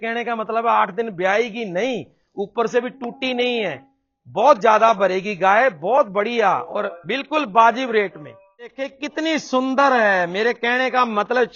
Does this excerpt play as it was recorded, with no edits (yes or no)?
no